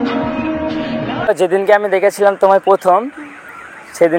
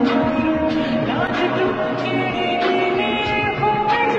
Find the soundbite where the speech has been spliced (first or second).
first